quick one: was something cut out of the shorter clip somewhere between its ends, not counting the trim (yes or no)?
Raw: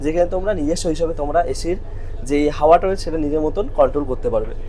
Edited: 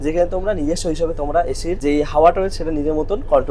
yes